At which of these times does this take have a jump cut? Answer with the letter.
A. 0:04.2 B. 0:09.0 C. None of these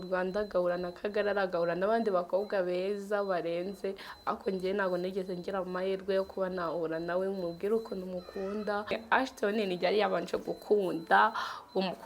B